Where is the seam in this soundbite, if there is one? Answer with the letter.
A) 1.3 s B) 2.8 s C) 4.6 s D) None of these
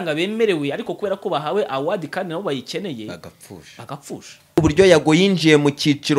C